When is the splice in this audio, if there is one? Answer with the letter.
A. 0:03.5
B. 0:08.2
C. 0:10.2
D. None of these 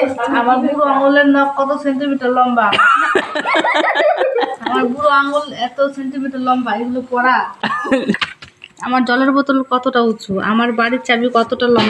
B